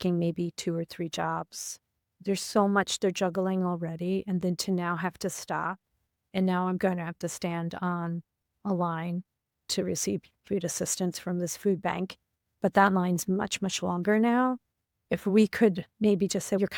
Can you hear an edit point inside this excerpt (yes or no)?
no